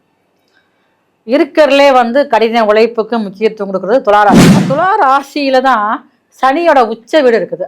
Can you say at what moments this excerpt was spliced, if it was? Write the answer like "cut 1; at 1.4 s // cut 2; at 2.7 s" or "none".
cut 1; at 4.6 s